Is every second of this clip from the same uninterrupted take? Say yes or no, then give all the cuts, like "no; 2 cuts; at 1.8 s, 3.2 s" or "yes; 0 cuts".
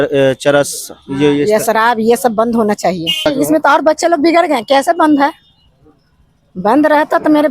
no; 1 cut; at 3.2 s